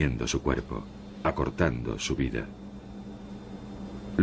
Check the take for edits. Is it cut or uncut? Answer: cut